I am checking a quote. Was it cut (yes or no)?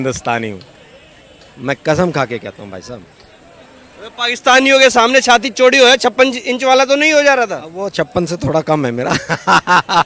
no